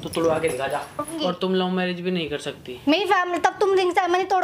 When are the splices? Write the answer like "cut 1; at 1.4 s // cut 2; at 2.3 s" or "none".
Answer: cut 1; at 1.1 s